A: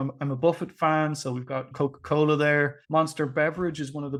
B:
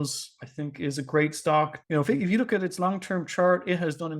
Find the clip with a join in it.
B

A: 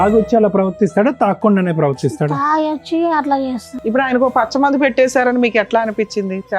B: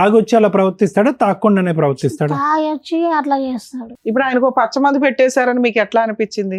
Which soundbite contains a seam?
A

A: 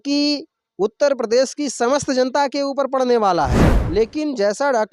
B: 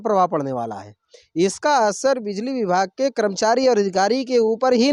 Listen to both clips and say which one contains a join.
A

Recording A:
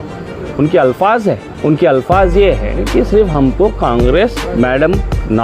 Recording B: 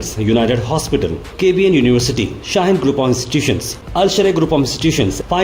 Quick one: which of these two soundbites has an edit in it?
A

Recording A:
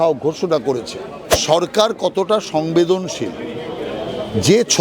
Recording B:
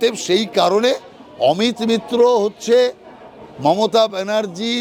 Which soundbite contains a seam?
A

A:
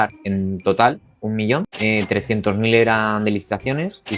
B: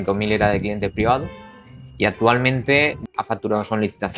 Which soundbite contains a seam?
B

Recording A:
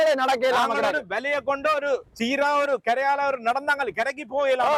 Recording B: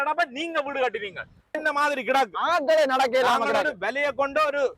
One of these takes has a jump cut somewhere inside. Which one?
B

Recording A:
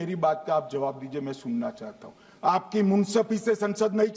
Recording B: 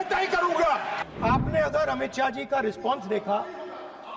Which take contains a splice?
B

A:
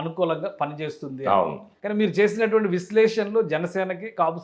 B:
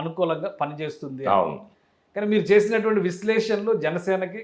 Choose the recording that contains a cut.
A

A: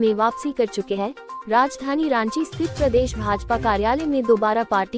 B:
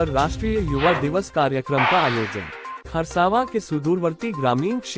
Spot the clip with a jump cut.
B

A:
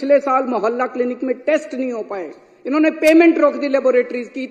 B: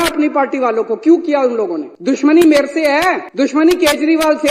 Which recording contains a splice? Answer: B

